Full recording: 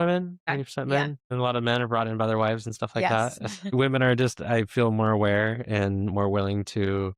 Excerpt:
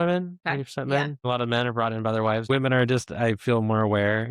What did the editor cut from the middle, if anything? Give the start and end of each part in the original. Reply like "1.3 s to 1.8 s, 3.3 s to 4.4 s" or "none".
1.2 s to 1.3 s, 2.6 s to 3.8 s

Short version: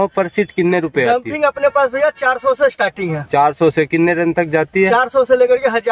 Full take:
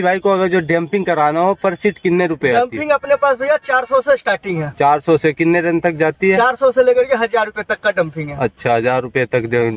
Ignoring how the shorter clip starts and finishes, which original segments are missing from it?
none

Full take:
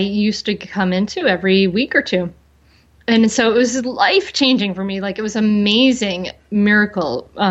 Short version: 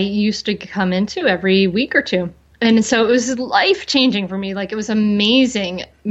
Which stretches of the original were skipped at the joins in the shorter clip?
2.4 s to 2.9 s

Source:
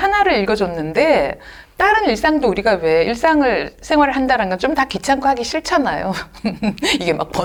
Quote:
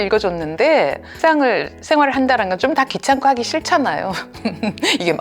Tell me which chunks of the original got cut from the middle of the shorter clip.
1.5 s to 3.1 s

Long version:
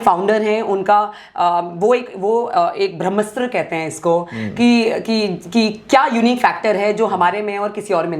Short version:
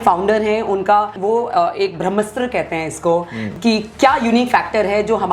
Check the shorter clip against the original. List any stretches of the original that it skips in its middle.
1.1 s to 2.1 s, 4.5 s to 5.4 s

